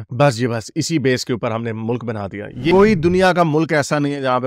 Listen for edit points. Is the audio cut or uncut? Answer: cut